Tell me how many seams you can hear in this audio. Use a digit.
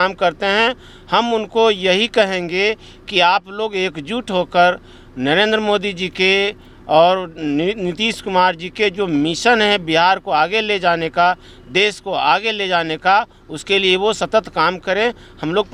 0